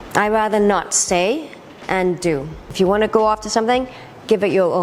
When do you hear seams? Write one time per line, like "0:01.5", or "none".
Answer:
0:02.7